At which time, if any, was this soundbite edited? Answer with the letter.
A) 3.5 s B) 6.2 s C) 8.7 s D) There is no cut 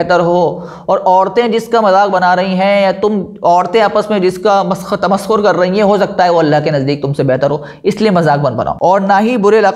C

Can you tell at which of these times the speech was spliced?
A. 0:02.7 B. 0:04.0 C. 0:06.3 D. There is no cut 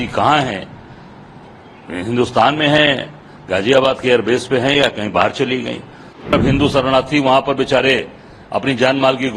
C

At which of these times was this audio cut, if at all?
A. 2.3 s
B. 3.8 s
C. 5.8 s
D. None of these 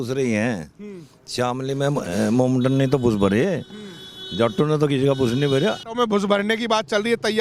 C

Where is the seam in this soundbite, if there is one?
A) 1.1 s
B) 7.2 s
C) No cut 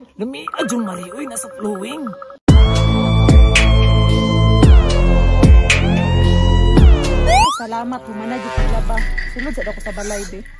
C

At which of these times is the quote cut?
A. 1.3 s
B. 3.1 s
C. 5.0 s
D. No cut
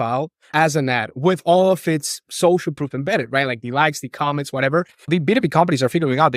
C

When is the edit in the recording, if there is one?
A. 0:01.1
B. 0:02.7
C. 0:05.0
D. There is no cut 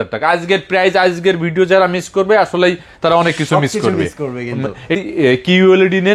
C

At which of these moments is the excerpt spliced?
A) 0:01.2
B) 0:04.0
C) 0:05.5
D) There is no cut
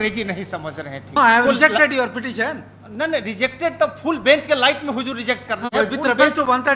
A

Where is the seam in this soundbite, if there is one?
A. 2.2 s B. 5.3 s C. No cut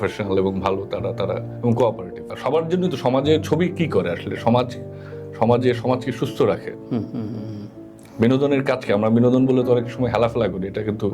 A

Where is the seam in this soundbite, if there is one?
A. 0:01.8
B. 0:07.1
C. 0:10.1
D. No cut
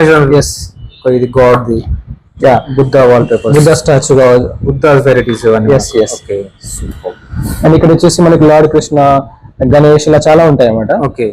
D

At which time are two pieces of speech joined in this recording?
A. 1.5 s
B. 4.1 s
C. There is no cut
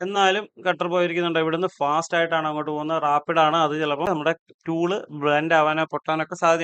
B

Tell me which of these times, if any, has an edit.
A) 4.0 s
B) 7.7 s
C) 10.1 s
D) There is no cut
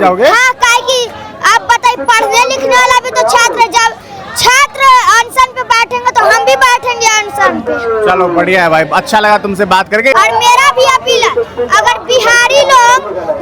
C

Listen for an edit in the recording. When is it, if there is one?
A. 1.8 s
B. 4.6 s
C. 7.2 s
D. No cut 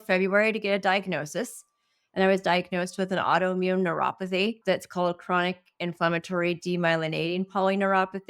B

